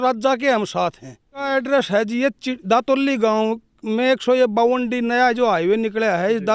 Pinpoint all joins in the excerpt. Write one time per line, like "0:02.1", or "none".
0:01.4